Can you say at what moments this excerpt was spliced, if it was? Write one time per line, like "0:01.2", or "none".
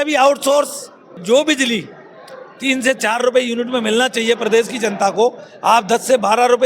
0:01.1